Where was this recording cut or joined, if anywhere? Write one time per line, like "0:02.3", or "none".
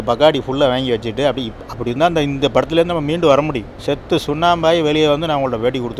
0:03.7